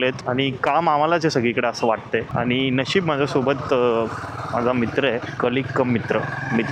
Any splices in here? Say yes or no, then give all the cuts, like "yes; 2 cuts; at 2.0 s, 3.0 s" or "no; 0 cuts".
no; 0 cuts